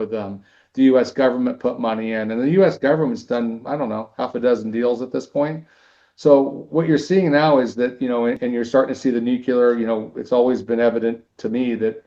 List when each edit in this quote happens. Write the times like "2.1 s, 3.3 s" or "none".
8.4 s